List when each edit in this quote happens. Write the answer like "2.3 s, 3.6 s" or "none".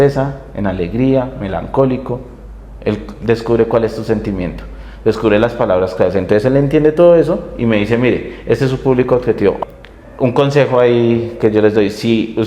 9.6 s